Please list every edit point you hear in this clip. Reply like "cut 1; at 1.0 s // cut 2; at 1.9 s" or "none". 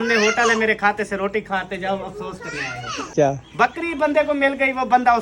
cut 1; at 3.1 s